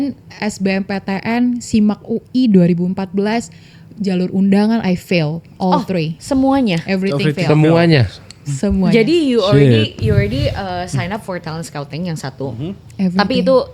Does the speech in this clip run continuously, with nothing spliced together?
yes; 0 cuts

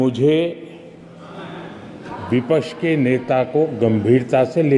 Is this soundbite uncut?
yes; 0 cuts

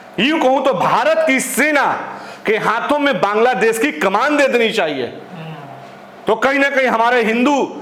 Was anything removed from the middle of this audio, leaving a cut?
no; 0 cuts

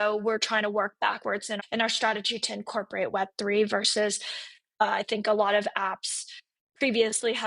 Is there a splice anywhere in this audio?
yes; 1 cut; at 1.6 s

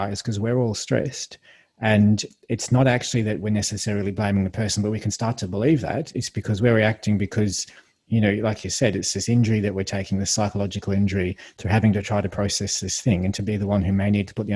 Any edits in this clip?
no; 0 cuts

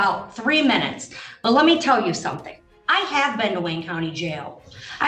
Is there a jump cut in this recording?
no; 0 cuts

